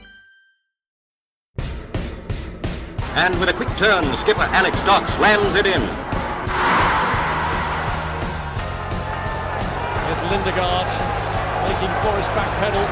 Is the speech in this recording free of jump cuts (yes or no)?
no